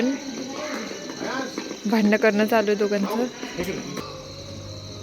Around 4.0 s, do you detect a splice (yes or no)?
yes